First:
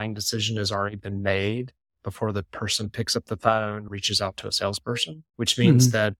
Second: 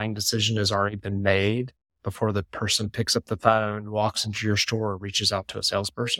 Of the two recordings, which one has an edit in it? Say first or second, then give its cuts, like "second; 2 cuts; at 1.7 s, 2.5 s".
first; 2 cuts; at 3.9 s, 5.2 s